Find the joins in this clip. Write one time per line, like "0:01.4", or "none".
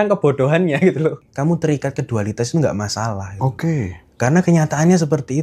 0:01.2